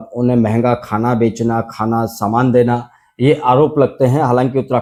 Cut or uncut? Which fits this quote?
uncut